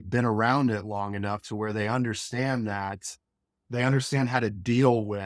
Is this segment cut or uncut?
uncut